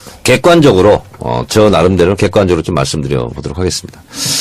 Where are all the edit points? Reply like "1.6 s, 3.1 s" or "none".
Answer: 2.2 s